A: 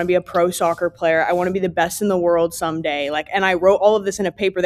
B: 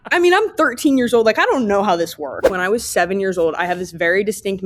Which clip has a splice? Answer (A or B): B